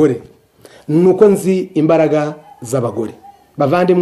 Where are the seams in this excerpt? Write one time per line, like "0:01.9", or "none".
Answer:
none